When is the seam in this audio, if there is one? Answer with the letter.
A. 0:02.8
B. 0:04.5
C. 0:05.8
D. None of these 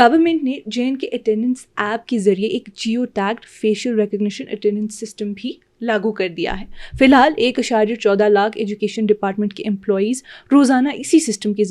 D